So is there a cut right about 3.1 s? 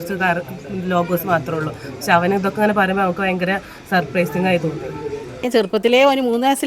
no; 1 cut; at 5.6 s

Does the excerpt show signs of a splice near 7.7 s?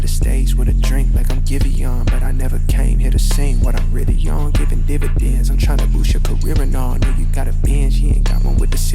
yes; 2 cuts; at 0.8 s, 7.7 s

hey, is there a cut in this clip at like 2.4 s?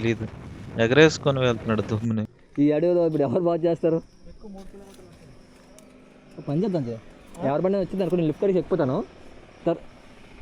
yes; 1 cut; at 2.4 s

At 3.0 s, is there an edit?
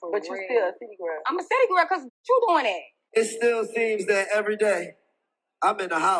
yes; 1 cut; at 3.0 s

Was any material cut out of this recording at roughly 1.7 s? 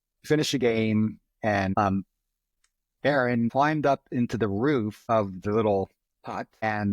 yes; 1 cut; at 1.7 s

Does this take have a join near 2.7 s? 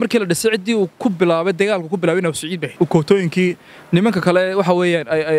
yes; 1 cut; at 2.7 s

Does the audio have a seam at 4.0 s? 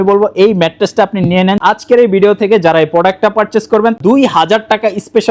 yes; 2 cuts; at 1.6 s, 4.0 s

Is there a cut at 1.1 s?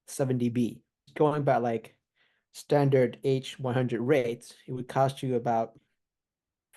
yes; 1 cut; at 1.1 s

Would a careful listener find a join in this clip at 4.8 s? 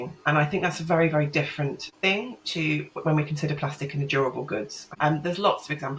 yes; 2 cuts; at 1.9 s, 4.8 s

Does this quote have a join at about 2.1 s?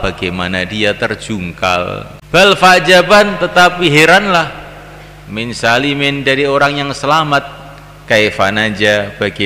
yes; 1 cut; at 2.1 s

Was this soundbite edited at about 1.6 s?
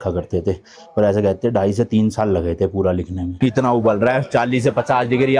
no; 1 cut; at 3.2 s

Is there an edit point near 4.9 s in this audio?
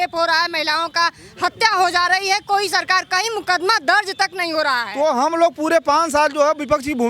yes; 1 cut; at 4.9 s

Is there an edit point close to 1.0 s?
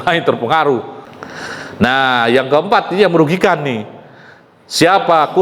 yes; 1 cut; at 1.0 s

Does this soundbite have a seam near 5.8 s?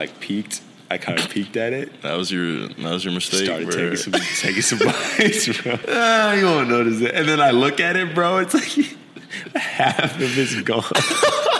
yes; 1 cut; at 5.8 s

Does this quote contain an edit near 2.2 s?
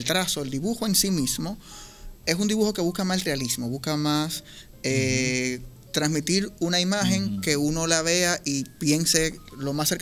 no; 0 cuts

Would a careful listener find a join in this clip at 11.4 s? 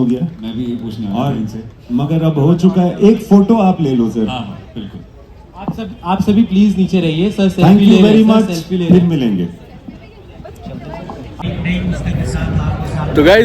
yes; 1 cut; at 11.4 s

